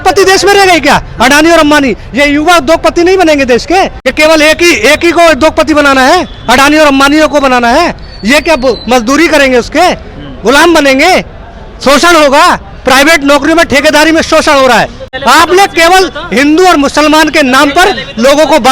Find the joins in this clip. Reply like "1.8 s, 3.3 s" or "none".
4.0 s, 15.0 s